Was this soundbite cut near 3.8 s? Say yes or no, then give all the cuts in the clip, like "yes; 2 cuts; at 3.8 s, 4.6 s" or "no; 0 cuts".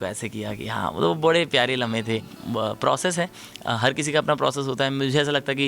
no; 1 cut; at 2.3 s